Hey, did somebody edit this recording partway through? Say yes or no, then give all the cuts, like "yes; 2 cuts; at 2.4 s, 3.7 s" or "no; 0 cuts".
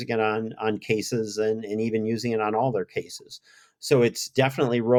no; 0 cuts